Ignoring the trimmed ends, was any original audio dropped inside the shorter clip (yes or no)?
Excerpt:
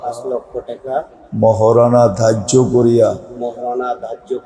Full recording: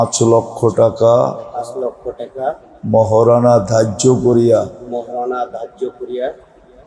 no